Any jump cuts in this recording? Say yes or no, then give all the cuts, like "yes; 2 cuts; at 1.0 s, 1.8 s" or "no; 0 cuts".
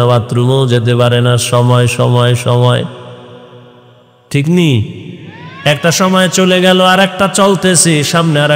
no; 0 cuts